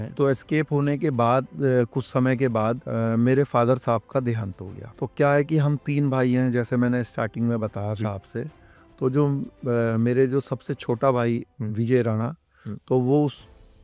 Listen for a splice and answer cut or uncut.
uncut